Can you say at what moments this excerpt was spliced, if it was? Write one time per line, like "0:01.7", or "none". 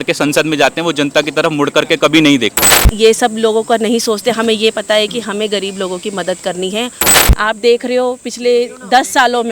0:02.9
0:07.0